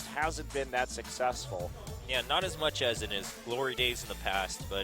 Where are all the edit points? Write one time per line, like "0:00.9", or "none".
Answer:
0:02.8